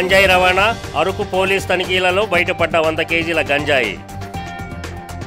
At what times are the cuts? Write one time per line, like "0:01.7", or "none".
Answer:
none